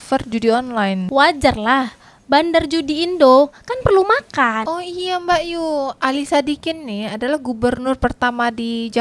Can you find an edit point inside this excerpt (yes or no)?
yes